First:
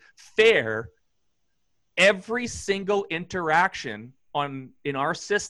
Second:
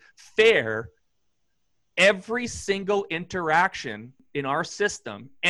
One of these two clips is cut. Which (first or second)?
second